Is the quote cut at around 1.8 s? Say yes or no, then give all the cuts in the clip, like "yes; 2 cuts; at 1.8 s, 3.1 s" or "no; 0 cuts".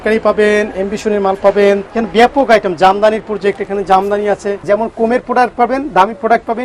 yes; 2 cuts; at 1.8 s, 4.5 s